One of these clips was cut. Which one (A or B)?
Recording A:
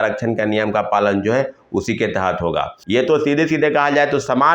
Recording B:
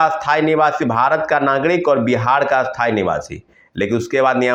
A